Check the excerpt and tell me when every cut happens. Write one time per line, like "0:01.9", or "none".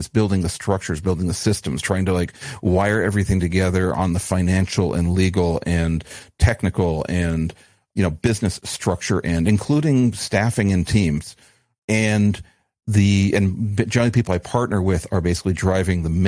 0:07.7
0:11.4